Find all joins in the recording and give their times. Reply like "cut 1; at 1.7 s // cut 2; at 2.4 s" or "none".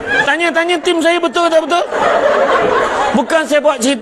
none